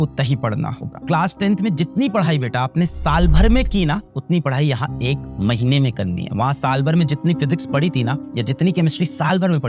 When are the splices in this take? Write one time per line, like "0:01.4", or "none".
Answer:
0:01.0